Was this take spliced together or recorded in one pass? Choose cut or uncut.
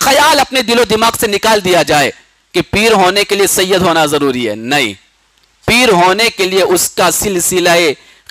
uncut